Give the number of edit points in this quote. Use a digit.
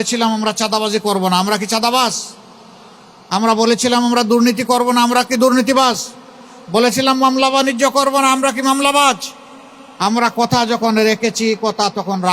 0